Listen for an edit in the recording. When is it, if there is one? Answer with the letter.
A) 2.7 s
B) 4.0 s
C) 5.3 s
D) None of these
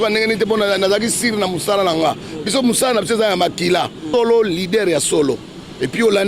B